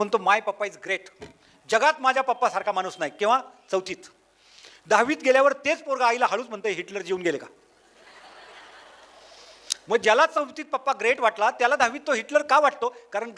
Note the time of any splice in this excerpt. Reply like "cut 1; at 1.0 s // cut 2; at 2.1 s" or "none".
none